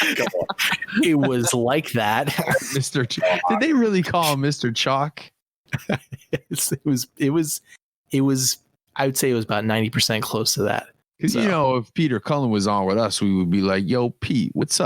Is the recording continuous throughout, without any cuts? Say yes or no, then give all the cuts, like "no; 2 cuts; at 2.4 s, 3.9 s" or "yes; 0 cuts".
yes; 0 cuts